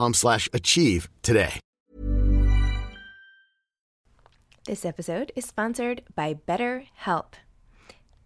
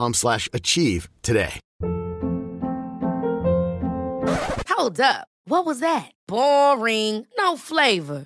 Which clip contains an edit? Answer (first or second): second